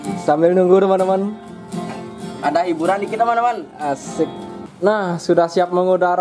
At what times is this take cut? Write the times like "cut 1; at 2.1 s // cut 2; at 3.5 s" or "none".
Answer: cut 1; at 4.7 s